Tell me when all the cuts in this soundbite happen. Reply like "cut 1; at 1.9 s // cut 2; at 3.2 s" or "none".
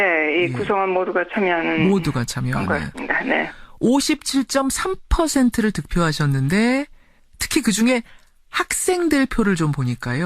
none